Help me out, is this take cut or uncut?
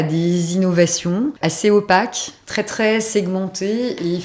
cut